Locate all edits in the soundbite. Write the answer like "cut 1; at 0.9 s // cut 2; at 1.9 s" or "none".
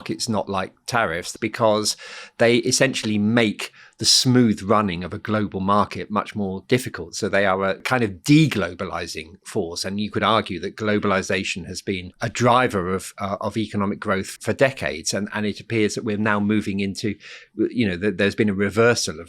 cut 1; at 1.3 s // cut 2; at 7.8 s // cut 3; at 12.1 s // cut 4; at 14.3 s